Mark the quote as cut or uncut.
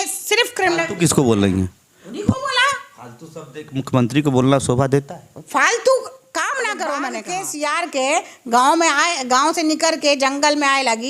cut